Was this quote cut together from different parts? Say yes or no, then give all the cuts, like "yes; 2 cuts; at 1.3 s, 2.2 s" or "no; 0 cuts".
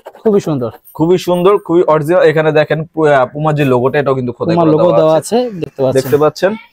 no; 0 cuts